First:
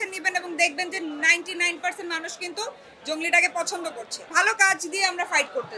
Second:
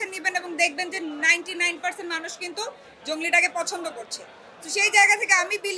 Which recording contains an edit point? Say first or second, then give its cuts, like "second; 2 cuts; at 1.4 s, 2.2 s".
first; 1 cut; at 4.1 s